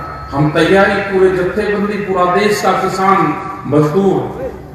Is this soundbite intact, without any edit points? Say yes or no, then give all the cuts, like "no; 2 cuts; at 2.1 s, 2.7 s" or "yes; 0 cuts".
yes; 0 cuts